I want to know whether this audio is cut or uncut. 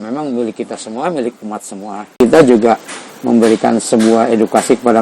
cut